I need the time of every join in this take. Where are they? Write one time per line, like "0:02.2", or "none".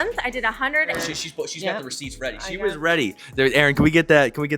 0:00.9